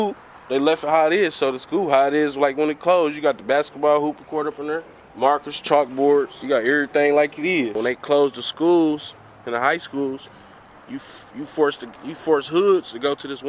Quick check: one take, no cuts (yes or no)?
yes